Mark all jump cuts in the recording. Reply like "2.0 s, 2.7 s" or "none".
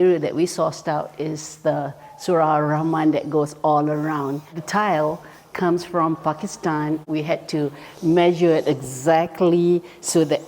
none